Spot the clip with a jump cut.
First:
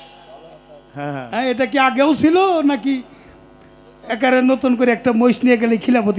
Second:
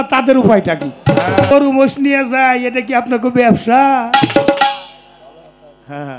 second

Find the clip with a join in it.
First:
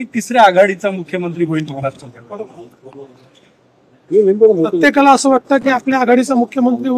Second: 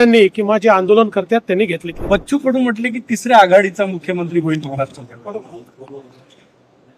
second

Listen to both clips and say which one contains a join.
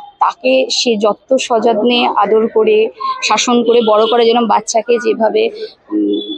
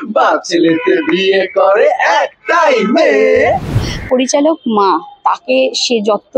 second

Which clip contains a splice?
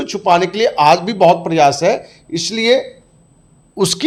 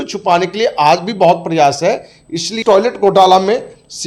second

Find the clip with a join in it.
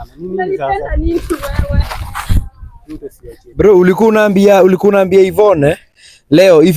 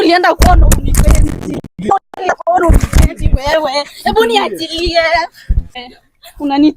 second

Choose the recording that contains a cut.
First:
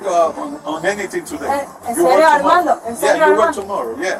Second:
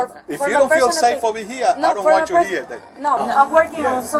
second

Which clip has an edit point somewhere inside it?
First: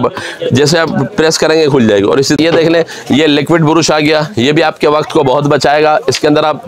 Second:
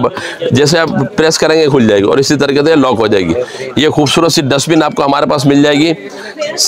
first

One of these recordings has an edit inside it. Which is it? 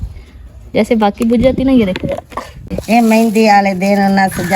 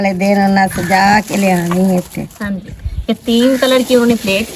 first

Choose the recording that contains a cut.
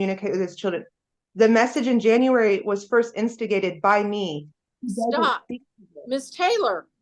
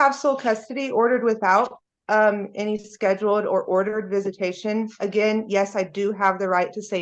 first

